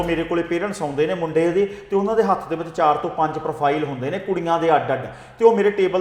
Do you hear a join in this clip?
no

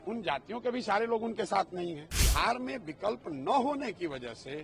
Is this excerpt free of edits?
no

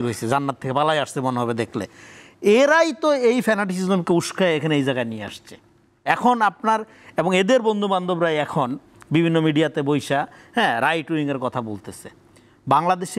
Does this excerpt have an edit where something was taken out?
no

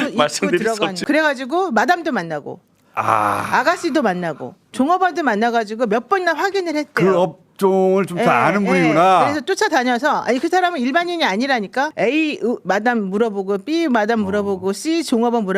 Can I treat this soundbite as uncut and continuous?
no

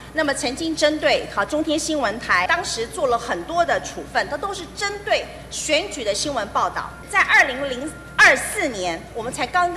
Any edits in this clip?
yes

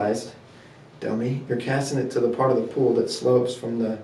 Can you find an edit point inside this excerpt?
no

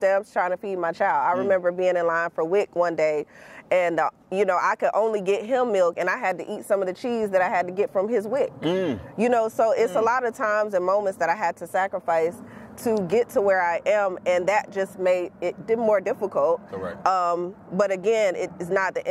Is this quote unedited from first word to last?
no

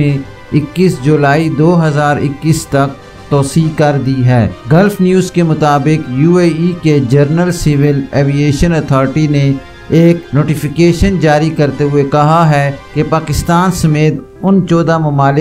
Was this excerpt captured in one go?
no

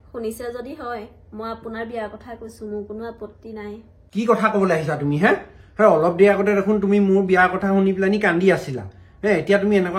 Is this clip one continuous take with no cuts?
no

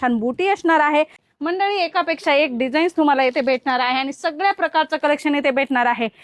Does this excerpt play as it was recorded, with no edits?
no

